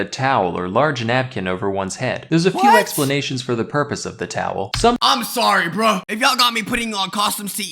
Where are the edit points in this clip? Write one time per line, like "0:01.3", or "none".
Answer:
none